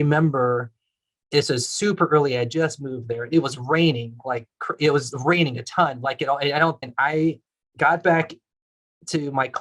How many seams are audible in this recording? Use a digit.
1